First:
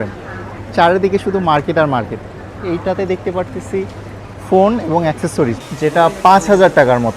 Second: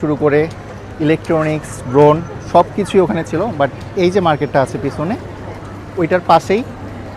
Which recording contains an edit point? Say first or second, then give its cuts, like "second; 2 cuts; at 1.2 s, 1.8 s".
first; 1 cut; at 5.6 s